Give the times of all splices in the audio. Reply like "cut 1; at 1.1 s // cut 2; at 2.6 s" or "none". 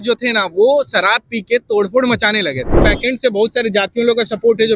cut 1; at 2.8 s